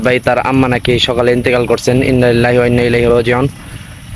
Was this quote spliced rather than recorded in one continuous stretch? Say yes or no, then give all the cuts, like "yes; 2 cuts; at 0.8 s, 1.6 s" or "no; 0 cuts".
no; 0 cuts